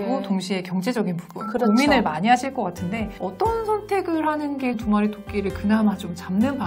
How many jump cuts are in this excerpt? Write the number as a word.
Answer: one